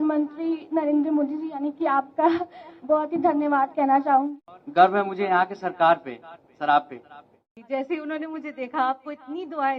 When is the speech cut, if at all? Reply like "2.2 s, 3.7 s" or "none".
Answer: 4.2 s, 7.4 s